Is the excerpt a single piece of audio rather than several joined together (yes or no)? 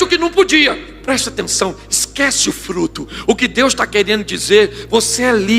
no